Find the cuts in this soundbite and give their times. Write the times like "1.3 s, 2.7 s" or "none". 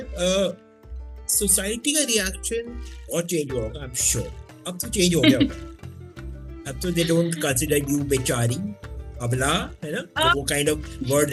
none